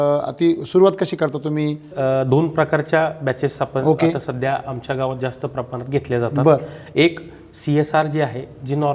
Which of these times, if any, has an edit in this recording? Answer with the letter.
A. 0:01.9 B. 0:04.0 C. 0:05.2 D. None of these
A